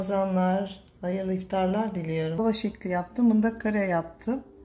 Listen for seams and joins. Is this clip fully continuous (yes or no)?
no